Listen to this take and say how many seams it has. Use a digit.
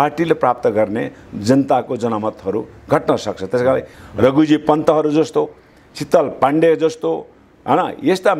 1